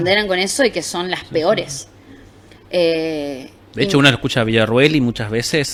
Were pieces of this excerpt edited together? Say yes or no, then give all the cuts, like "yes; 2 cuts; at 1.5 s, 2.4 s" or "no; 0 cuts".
no; 0 cuts